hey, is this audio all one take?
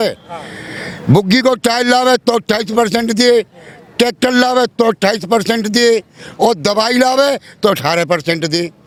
yes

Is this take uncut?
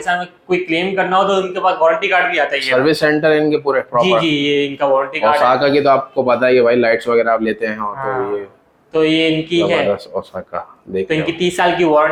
yes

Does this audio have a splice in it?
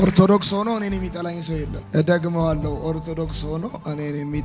no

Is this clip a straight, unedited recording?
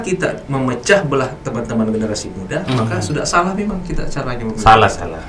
yes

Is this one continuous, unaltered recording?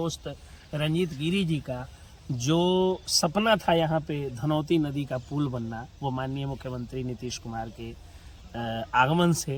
yes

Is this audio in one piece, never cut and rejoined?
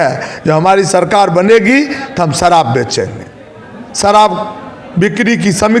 yes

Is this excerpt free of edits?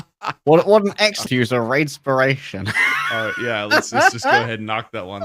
no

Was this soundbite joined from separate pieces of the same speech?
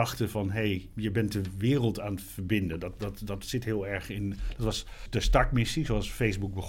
no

